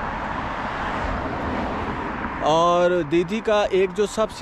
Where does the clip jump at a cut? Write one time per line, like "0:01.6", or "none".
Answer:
none